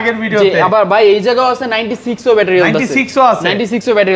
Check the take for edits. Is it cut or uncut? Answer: uncut